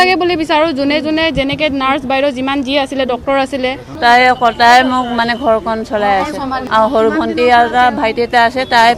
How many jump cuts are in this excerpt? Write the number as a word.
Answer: two